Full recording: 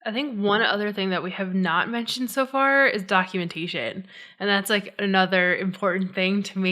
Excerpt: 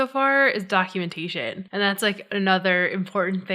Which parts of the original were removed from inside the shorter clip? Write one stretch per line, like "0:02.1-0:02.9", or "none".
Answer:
0:04.0-0:04.3